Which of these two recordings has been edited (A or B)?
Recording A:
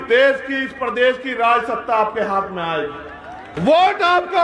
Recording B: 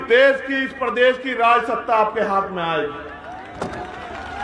A